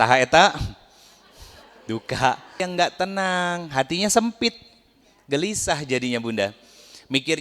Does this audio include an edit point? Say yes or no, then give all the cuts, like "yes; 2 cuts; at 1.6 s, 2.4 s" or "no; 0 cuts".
yes; 1 cut; at 2.6 s